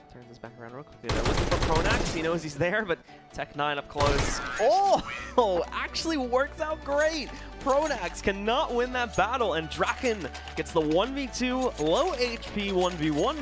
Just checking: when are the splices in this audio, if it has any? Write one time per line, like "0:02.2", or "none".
none

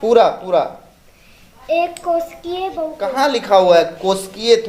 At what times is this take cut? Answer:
0:03.1

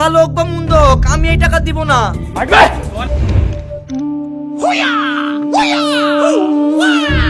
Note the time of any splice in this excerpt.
none

